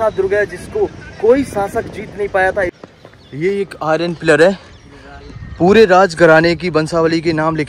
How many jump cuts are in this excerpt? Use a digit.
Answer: 1